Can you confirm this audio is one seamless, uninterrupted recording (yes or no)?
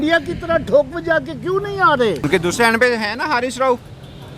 no